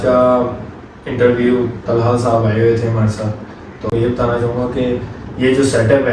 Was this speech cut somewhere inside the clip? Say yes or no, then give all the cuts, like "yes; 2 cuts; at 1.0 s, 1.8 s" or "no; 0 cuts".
yes; 1 cut; at 3.9 s